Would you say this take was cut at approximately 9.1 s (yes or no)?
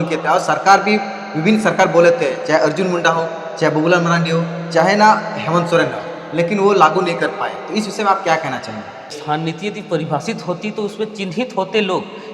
yes